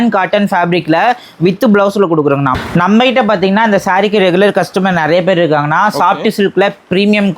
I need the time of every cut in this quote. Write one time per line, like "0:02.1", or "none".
0:02.6